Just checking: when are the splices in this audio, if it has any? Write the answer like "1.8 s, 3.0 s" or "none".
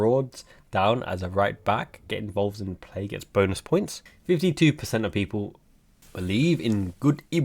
4.0 s

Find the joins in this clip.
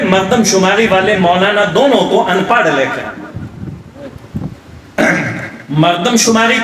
none

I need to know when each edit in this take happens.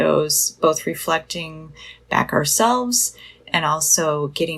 none

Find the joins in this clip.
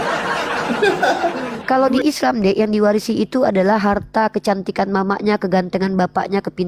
1.5 s

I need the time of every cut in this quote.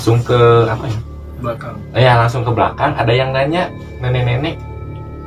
none

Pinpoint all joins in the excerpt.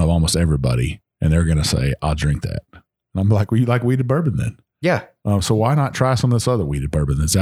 none

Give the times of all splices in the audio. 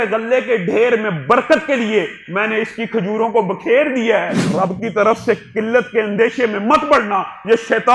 4.6 s

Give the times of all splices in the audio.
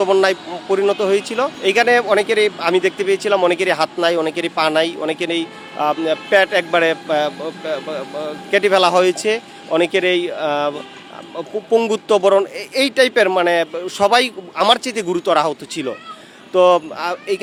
none

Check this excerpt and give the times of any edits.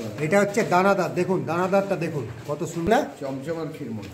2.9 s

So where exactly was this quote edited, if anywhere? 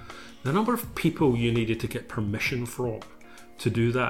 none

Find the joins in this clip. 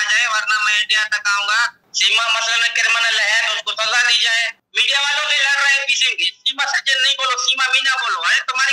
1.8 s, 4.7 s

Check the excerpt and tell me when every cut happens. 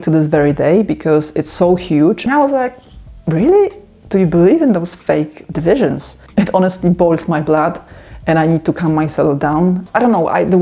2.2 s, 6.2 s, 9.8 s

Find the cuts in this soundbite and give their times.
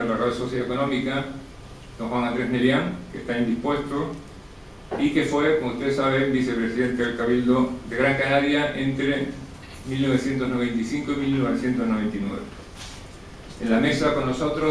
1.5 s

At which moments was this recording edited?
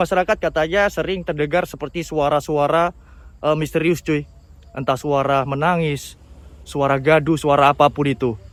none

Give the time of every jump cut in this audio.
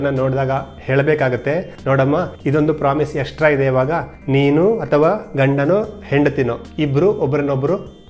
2.1 s, 4.1 s, 6.6 s

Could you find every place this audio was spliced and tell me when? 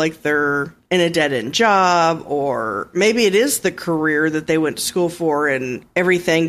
none

